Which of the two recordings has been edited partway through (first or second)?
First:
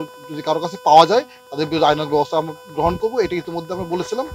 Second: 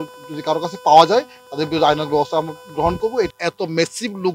second